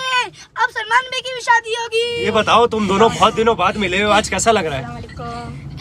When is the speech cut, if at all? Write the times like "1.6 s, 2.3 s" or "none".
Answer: 2.2 s

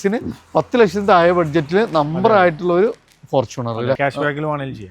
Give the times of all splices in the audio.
4.0 s

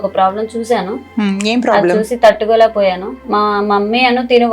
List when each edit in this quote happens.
3.1 s

